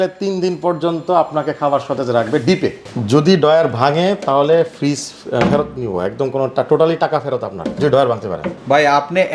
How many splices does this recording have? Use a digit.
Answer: 1